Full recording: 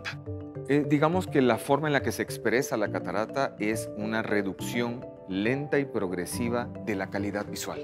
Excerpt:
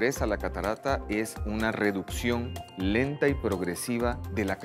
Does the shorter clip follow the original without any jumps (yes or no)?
yes